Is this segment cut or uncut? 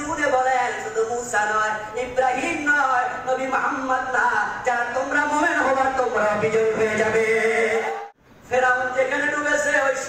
cut